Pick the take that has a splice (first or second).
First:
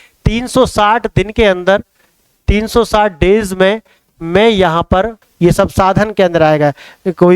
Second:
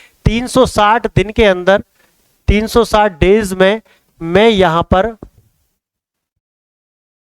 first